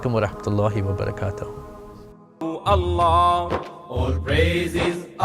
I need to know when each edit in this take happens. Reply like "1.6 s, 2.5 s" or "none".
2.5 s